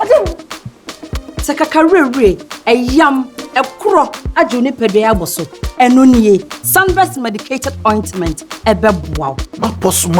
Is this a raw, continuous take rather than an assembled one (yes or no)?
yes